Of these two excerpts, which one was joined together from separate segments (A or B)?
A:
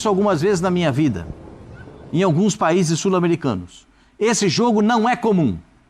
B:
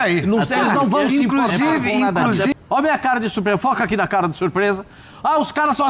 B